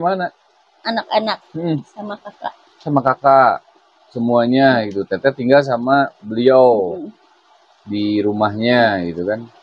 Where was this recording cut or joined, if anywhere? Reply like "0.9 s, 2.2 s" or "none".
none